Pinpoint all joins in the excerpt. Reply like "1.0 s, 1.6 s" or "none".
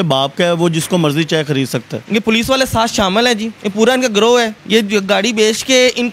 1.9 s, 3.6 s, 4.6 s